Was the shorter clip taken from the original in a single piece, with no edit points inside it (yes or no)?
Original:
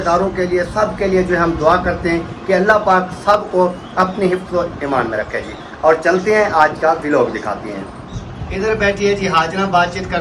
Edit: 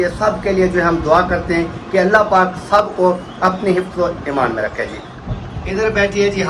no